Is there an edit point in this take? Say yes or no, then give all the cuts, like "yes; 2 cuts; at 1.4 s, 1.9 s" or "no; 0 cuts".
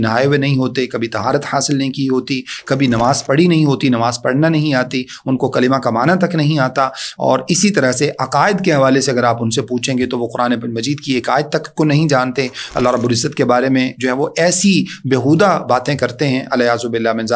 no; 0 cuts